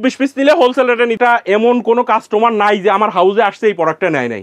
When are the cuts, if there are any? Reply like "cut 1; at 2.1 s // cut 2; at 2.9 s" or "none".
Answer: cut 1; at 1.1 s